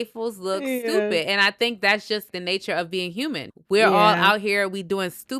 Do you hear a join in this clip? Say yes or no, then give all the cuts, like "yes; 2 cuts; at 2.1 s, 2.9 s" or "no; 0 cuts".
yes; 2 cuts; at 2.3 s, 3.5 s